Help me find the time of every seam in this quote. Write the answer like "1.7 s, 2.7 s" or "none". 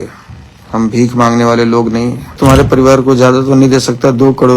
2.4 s